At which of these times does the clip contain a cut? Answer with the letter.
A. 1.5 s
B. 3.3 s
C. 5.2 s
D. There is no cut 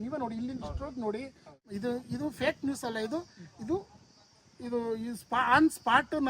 A